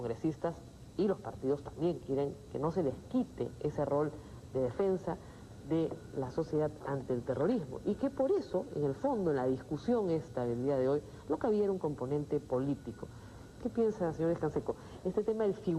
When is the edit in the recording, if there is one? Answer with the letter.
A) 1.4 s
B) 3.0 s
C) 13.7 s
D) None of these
C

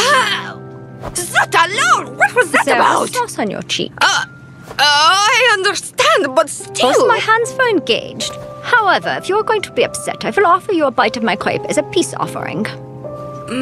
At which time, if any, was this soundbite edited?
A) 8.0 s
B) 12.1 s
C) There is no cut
B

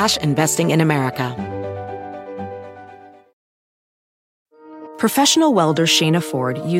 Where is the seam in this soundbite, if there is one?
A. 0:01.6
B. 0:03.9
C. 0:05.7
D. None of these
A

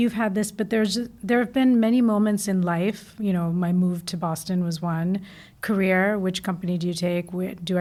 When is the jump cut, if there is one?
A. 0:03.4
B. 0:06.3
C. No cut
C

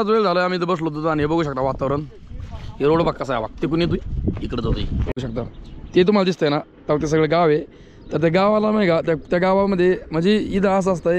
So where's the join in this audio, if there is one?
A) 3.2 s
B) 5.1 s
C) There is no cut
B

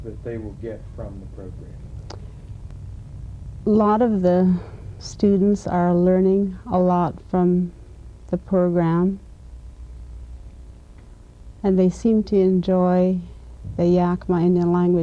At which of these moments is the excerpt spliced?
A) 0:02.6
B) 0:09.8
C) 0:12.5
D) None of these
C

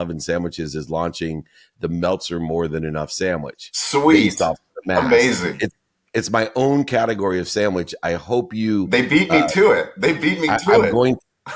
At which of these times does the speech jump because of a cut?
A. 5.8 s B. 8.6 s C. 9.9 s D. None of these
D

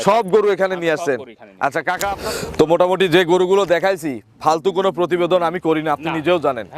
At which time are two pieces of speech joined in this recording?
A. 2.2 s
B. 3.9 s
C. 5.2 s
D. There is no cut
A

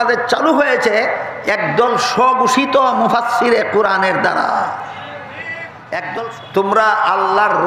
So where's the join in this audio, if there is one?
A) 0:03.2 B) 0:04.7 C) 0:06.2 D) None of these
C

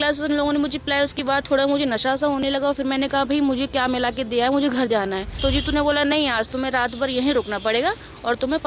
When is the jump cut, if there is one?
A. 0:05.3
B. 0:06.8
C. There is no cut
A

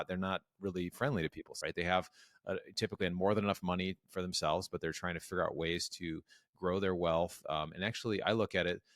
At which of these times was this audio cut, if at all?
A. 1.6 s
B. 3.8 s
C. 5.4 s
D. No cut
A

